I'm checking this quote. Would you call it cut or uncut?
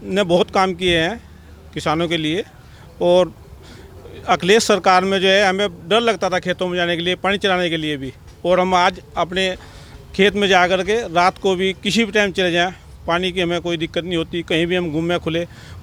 uncut